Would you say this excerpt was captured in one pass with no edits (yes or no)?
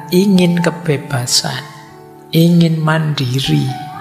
yes